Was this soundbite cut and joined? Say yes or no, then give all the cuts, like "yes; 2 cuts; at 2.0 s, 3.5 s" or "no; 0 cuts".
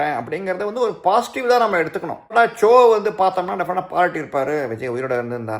yes; 1 cut; at 2.3 s